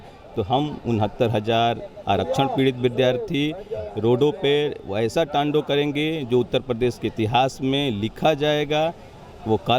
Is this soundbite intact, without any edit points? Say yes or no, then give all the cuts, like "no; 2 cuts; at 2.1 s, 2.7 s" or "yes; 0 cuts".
yes; 0 cuts